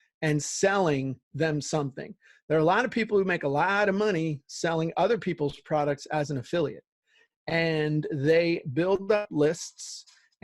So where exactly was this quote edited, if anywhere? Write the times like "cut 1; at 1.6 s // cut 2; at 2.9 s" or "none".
none